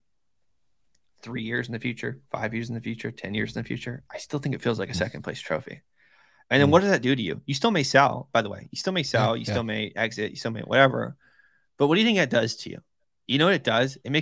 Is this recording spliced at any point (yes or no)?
no